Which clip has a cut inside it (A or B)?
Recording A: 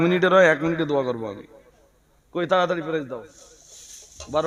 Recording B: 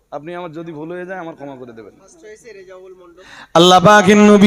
B